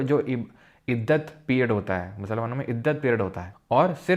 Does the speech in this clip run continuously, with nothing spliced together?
yes; 0 cuts

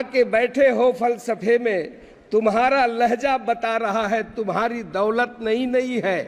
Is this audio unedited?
yes; 0 cuts

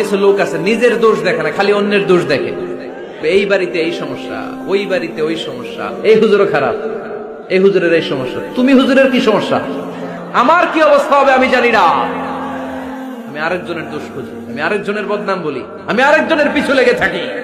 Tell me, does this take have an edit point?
no; 0 cuts

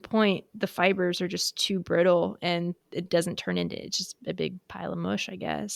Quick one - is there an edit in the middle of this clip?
no; 0 cuts

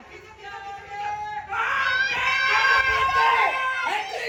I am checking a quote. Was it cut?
no; 0 cuts

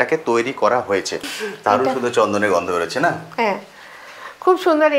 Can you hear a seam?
yes; 1 cut; at 1.2 s

